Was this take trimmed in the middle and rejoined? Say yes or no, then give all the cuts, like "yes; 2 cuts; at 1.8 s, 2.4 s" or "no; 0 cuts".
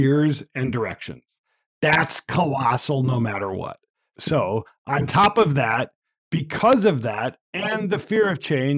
no; 0 cuts